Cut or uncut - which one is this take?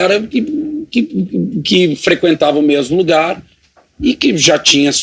uncut